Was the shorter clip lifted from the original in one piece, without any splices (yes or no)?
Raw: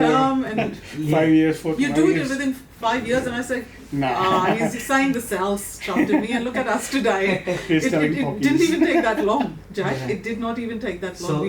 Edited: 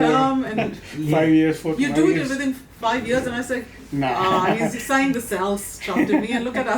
yes